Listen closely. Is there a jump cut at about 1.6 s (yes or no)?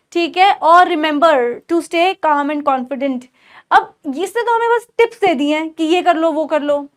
no